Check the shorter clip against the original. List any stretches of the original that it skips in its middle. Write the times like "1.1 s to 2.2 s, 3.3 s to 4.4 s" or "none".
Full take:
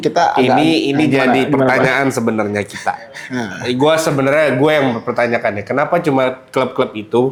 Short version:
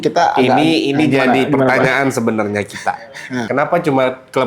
3.4 s to 5.6 s